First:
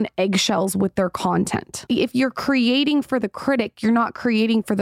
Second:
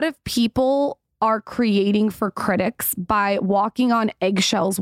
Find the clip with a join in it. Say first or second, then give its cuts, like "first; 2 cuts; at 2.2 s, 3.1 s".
first; 1 cut; at 1.8 s